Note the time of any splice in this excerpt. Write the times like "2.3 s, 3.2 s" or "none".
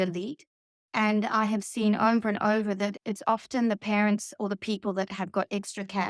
3.0 s